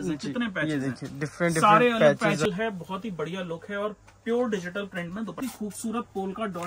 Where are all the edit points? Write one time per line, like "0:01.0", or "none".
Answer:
0:02.5
0:05.4